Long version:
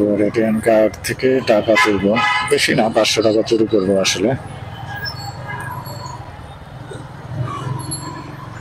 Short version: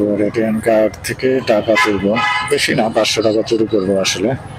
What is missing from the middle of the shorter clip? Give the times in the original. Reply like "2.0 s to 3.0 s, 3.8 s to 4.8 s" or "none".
none